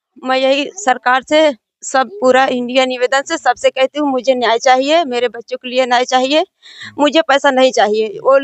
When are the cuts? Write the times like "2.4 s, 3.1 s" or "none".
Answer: none